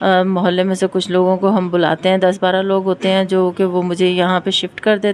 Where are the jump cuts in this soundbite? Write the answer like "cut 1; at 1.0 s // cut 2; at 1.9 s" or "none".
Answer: none